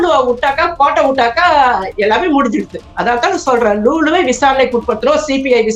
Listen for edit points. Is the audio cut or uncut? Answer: uncut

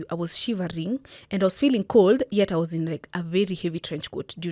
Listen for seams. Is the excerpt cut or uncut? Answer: uncut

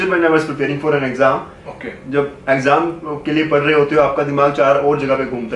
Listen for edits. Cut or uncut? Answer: uncut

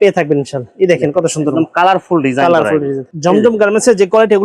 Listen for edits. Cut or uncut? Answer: cut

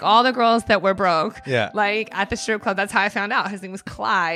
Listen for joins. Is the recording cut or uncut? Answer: uncut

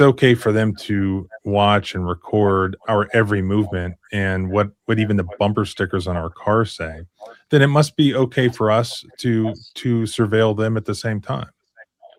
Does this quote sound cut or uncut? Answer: uncut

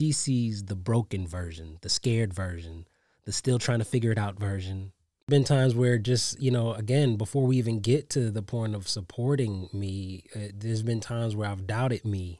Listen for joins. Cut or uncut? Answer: cut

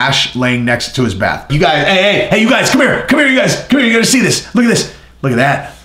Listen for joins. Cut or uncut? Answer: cut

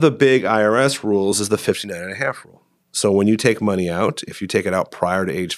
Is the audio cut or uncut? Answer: uncut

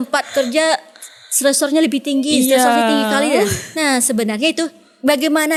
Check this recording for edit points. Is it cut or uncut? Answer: uncut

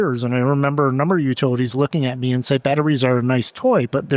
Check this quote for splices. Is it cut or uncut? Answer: uncut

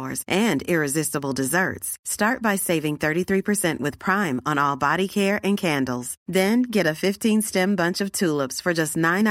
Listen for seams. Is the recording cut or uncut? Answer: uncut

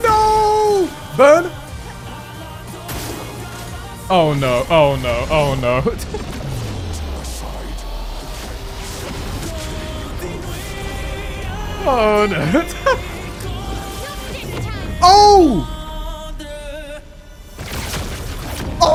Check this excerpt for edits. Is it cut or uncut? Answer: uncut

